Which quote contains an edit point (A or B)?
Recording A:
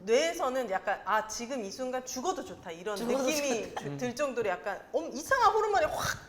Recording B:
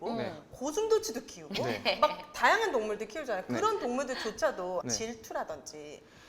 B